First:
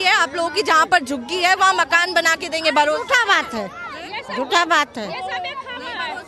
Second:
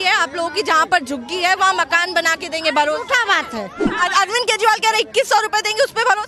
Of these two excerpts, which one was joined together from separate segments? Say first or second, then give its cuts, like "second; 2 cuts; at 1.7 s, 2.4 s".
second; 1 cut; at 3.8 s